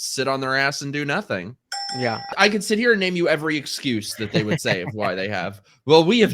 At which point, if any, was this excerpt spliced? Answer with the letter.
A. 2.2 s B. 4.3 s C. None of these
A